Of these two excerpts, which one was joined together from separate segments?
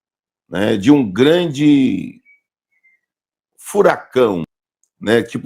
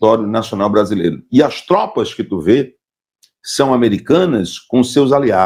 first; 1 cut; at 4.5 s

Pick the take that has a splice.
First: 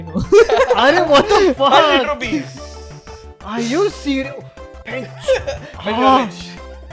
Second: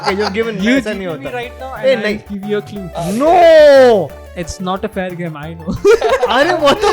second; 1 cut; at 2.8 s

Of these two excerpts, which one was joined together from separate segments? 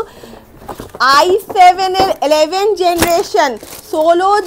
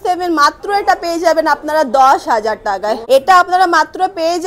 second; 1 cut; at 3.0 s

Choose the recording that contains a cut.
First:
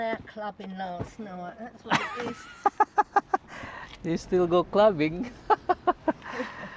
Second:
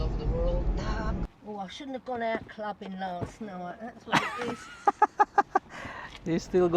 second; 1 cut; at 1.2 s

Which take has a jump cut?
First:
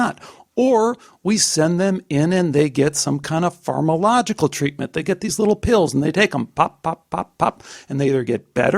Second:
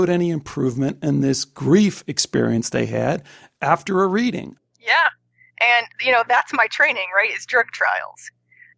second; 1 cut; at 4.5 s

